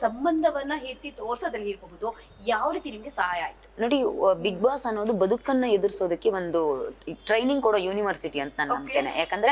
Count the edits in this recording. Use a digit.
0